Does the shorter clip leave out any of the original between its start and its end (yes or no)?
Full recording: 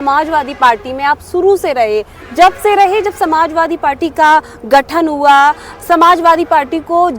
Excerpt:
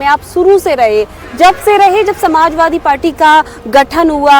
no